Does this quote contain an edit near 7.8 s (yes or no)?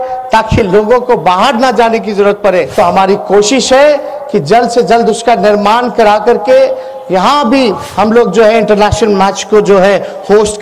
yes